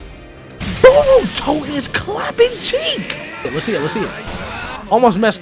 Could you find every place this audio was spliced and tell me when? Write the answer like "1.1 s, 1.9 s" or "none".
3.5 s